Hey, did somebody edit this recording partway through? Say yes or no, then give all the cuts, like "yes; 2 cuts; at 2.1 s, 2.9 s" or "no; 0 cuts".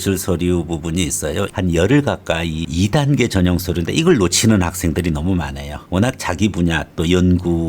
yes; 2 cuts; at 1.5 s, 2.6 s